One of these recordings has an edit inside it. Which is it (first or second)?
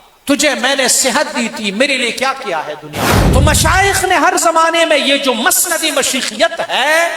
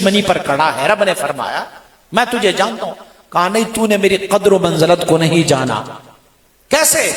first